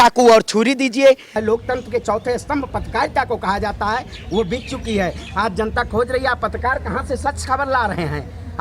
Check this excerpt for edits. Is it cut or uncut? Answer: cut